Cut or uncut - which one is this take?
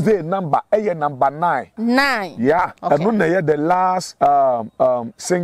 cut